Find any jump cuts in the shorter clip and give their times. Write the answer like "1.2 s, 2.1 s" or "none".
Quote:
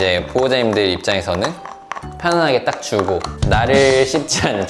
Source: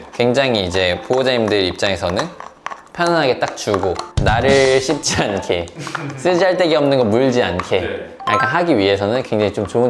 none